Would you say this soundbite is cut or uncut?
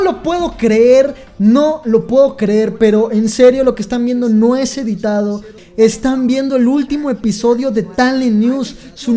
cut